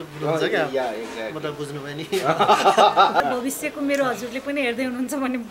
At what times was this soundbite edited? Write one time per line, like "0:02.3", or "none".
0:03.2